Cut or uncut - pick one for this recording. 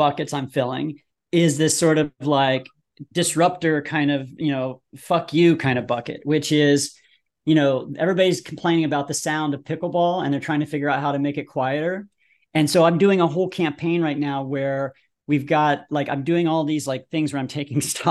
uncut